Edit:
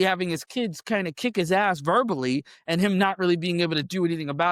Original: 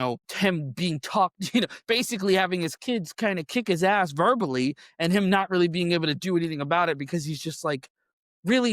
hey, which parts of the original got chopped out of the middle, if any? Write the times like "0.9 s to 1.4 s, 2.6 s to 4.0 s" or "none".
none